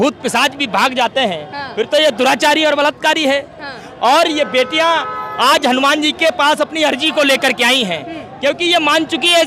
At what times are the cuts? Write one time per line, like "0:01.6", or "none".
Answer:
none